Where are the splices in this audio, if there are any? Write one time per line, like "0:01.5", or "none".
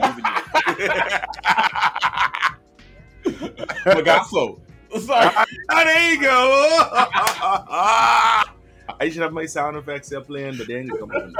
none